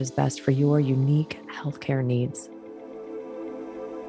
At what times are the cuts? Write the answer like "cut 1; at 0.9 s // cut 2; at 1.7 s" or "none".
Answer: cut 1; at 2.4 s